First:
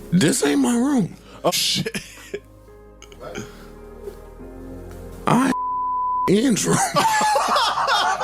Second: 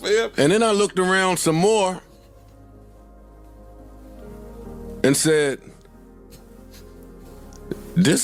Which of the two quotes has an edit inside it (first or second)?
first